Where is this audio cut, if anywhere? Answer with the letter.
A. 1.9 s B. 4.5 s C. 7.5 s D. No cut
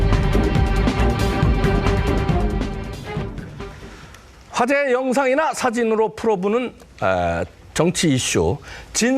D